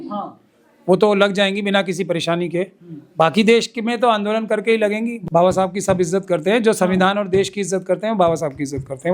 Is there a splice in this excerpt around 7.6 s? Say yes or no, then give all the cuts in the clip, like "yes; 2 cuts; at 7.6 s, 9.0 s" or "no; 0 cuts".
no; 1 cut; at 5.1 s